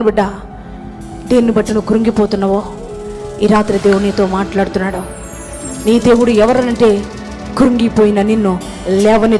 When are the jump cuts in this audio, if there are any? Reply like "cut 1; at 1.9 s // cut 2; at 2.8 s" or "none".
none